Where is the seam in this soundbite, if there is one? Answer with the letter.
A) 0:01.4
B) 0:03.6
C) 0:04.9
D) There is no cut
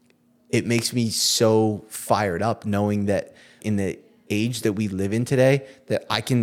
B